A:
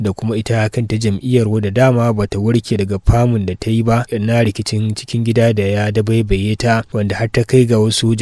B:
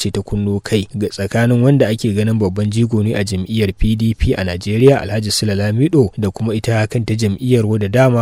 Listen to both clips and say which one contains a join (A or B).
A